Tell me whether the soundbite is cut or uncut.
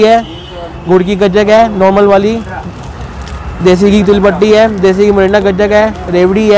uncut